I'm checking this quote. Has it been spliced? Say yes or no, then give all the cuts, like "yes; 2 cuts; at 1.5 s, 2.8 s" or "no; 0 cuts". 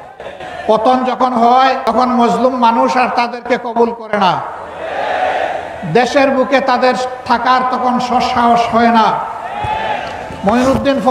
no; 0 cuts